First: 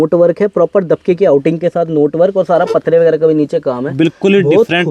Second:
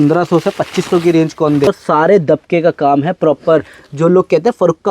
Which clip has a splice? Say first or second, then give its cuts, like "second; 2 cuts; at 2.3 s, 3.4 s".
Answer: second; 1 cut; at 1.7 s